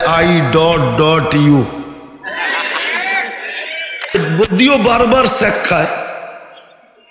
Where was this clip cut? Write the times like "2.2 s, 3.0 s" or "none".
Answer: 4.1 s

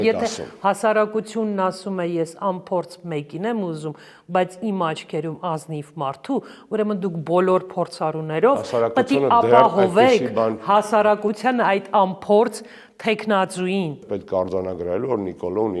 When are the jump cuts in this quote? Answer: 14.0 s

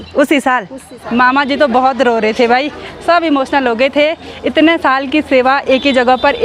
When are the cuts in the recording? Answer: 0.9 s

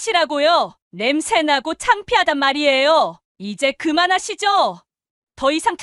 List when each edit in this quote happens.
3.2 s

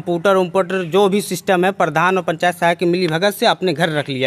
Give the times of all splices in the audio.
none

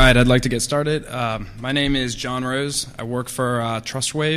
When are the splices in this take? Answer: none

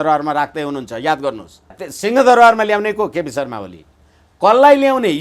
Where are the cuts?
1.8 s

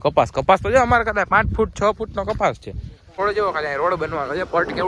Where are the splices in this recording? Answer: 3.2 s

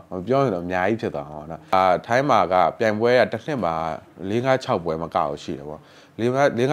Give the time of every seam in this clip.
1.7 s

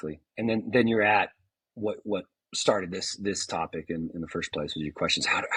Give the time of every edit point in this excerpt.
none

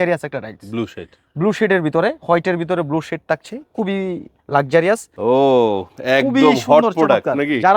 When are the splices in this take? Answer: 5.1 s

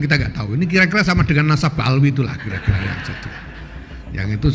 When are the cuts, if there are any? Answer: none

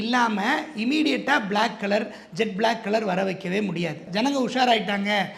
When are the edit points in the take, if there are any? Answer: 4.0 s

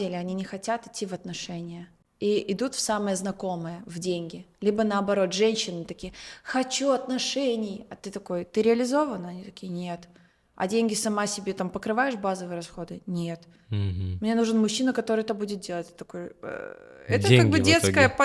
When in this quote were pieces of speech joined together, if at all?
none

